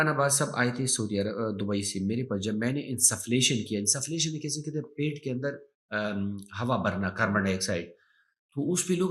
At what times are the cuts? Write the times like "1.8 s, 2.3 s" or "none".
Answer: none